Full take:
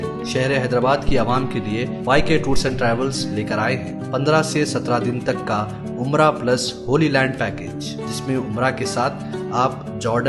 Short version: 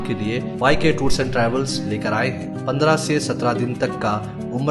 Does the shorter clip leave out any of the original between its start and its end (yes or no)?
no